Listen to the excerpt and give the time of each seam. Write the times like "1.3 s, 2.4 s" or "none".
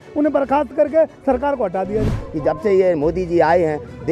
2.2 s